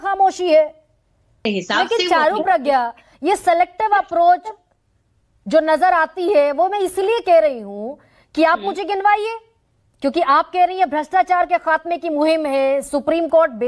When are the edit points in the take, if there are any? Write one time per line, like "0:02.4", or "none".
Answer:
0:01.5